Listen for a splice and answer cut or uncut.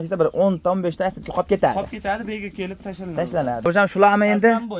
cut